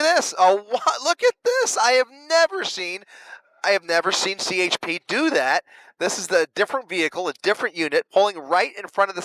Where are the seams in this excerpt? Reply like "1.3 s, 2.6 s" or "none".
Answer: none